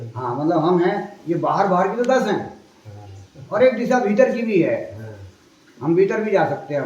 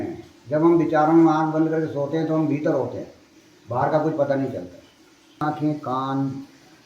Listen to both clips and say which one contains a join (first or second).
second